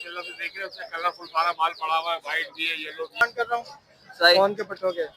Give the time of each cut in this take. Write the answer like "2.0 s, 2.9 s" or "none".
3.2 s